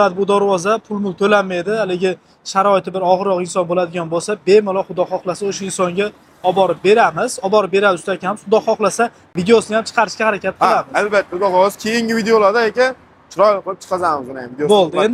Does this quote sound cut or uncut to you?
uncut